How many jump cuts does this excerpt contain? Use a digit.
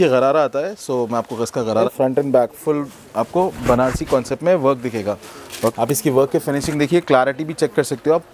2